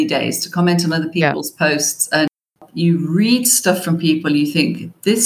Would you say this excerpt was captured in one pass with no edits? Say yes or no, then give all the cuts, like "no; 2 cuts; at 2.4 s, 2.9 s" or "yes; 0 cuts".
no; 1 cut; at 2.5 s